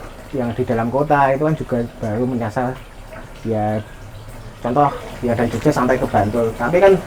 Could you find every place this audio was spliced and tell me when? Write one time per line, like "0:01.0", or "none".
none